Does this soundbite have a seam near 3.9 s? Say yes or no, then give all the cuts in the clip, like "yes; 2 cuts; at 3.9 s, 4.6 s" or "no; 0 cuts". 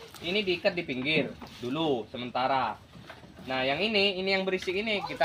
no; 0 cuts